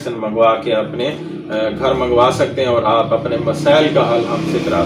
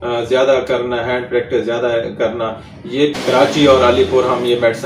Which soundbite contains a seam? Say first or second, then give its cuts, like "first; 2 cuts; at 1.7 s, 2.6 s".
second; 1 cut; at 3.1 s